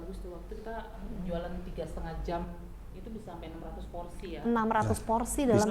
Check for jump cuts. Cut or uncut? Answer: uncut